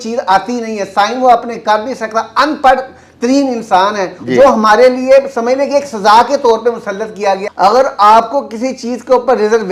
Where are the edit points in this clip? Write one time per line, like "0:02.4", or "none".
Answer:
0:07.4